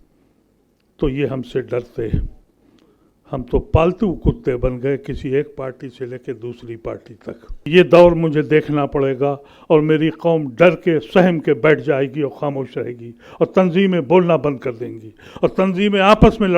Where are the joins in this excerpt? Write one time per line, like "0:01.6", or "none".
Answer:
0:07.7